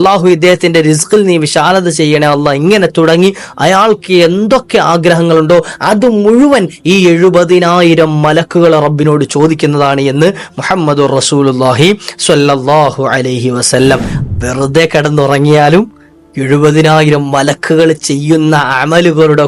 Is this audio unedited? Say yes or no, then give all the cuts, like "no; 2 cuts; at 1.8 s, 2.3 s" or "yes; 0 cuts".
no; 1 cut; at 14.1 s